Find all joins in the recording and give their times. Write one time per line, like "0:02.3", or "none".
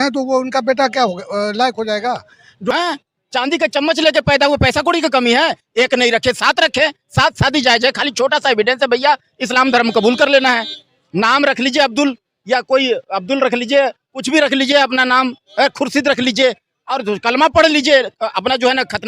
0:02.7

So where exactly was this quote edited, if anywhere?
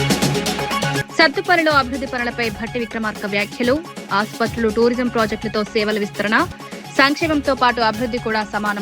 0:01.0

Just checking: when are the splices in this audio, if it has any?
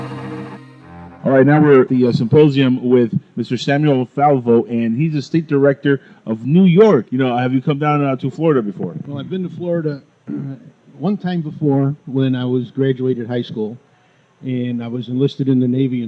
0:11.0

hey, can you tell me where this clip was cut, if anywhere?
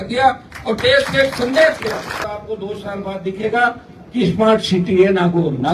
0:02.3

